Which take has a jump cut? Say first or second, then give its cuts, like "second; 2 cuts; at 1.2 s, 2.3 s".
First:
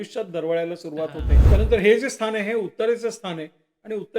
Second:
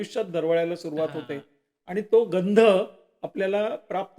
first; 1 cut; at 1.3 s